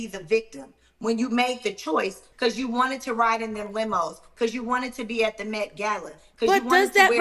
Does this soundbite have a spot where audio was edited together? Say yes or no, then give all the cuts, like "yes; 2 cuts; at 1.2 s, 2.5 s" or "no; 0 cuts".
yes; 1 cut; at 2.3 s